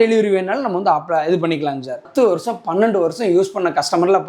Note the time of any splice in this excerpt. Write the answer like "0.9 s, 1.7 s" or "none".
2.1 s

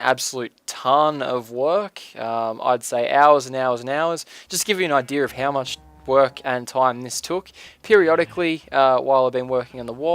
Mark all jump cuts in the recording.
7.6 s

